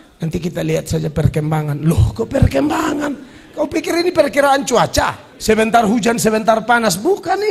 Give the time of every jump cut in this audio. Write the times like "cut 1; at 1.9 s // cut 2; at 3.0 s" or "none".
cut 1; at 5.3 s